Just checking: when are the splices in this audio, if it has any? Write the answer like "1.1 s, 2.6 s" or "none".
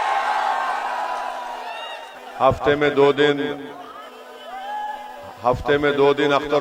none